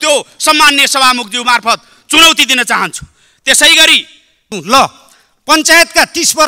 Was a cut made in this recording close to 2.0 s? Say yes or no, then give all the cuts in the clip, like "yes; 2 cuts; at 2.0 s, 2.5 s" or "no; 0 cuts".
no; 1 cut; at 4.4 s